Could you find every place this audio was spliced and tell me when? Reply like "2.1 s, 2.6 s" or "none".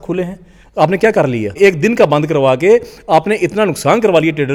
none